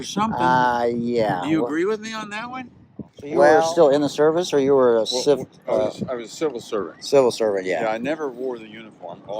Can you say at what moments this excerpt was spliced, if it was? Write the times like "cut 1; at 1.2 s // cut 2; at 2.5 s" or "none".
cut 1; at 3.5 s